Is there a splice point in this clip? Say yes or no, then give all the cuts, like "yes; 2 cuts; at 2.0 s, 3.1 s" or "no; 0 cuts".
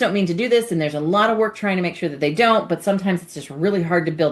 no; 0 cuts